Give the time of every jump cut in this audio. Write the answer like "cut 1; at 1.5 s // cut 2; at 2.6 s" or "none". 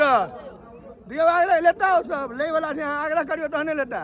none